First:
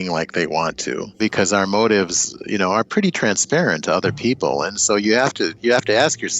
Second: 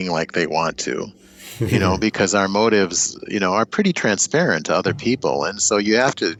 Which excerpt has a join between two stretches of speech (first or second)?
first